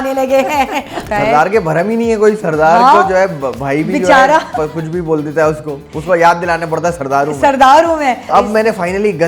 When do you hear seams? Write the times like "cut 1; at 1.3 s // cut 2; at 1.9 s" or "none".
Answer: cut 1; at 1.0 s // cut 2; at 8.2 s

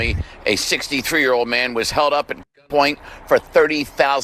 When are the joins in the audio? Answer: none

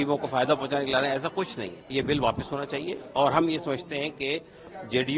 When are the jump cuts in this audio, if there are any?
cut 1; at 1.9 s

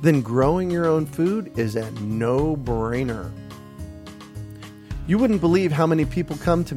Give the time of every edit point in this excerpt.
none

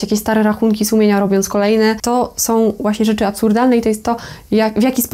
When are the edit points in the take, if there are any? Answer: cut 1; at 2.0 s

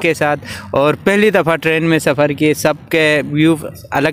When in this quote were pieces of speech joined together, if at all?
none

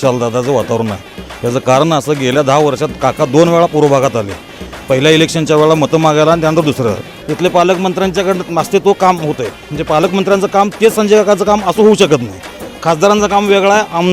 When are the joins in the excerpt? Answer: cut 1; at 7.1 s // cut 2; at 12.3 s

